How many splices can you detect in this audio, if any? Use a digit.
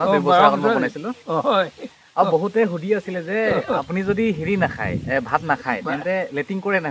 0